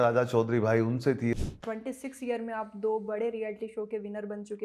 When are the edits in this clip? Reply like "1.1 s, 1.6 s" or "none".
1.3 s